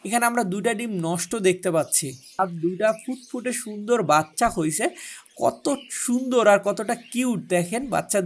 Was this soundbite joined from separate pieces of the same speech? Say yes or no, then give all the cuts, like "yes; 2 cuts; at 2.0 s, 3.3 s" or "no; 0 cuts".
yes; 1 cut; at 2.4 s